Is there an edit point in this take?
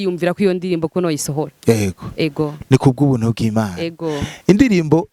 no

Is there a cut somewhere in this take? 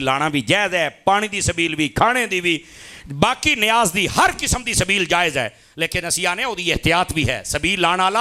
no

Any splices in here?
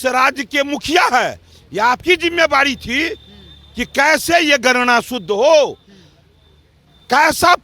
no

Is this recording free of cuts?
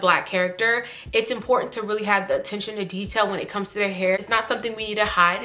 no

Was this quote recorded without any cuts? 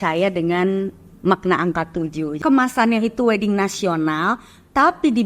no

